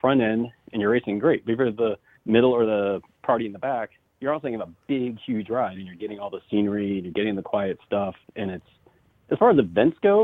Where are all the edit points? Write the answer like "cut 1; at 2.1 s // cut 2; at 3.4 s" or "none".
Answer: cut 1; at 2.1 s // cut 2; at 3.1 s // cut 3; at 4.0 s